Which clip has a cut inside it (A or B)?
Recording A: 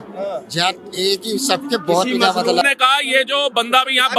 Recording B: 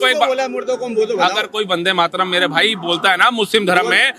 A